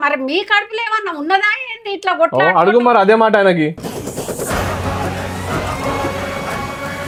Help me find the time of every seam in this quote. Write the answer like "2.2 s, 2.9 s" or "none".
none